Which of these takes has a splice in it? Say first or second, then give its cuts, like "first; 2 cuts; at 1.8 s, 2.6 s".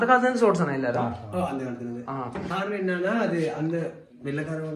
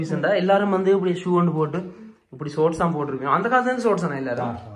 first; 1 cut; at 2.4 s